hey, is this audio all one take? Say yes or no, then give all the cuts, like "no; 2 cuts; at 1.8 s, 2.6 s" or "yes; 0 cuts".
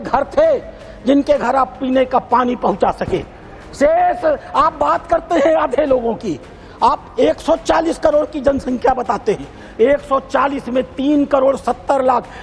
yes; 0 cuts